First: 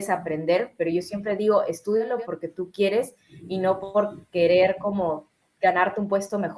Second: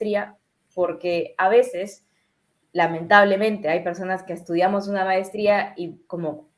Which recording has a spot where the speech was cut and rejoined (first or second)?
first